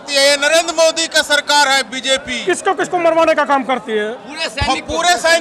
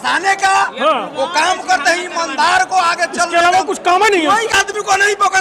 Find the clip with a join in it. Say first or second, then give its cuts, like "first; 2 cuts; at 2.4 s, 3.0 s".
second; 1 cut; at 4.5 s